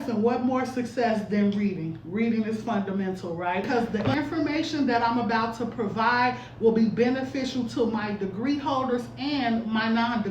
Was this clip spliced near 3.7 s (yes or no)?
yes